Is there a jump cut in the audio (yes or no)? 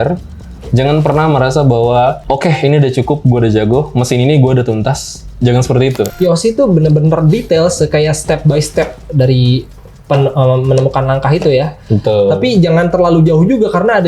yes